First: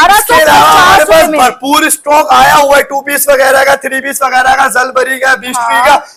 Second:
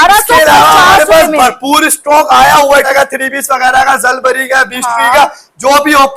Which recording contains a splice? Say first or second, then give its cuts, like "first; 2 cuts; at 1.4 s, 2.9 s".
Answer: second; 1 cut; at 2.9 s